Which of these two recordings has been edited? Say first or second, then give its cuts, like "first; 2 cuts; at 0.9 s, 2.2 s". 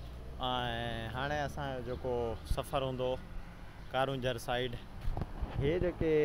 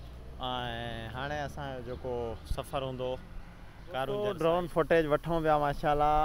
second; 1 cut; at 4.0 s